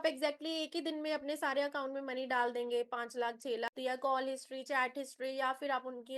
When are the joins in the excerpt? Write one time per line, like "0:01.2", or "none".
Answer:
0:03.7